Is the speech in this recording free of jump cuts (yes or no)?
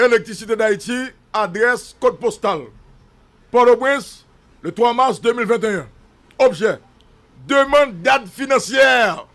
yes